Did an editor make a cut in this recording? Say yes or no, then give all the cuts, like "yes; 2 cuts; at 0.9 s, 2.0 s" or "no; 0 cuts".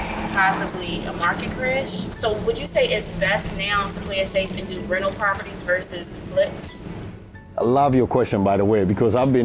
yes; 1 cut; at 2.1 s